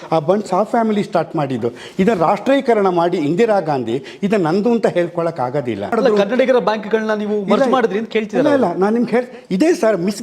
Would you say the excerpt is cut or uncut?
cut